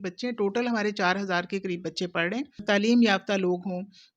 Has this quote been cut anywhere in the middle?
yes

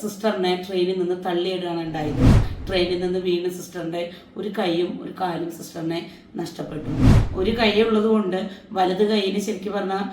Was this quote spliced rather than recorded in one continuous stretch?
yes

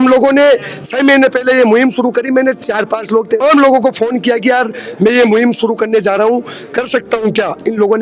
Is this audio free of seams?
no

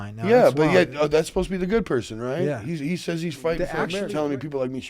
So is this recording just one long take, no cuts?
no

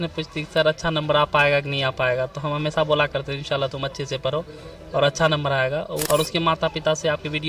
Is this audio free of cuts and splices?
no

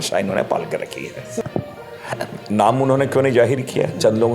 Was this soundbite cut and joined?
yes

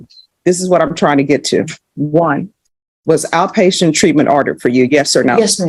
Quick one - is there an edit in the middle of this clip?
no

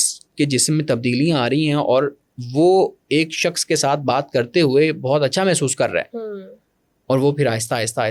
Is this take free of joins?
yes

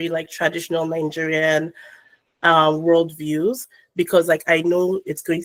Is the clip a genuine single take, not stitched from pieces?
yes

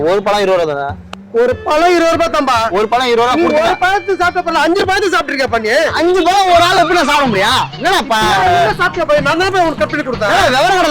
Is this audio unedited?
yes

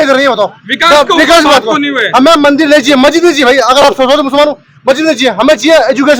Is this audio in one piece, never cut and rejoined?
yes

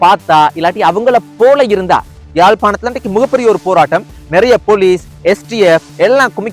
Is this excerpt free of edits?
no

